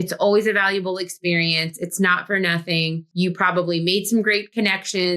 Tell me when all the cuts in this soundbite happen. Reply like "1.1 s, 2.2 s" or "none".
3.0 s